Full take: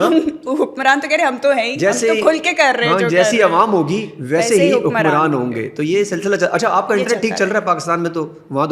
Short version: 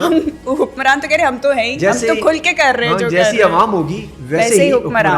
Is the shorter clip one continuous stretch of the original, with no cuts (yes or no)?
yes